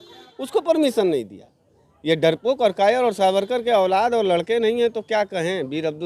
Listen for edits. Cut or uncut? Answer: uncut